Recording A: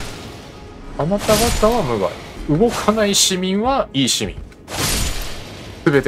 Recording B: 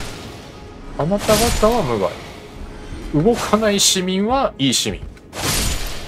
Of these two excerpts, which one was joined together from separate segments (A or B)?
A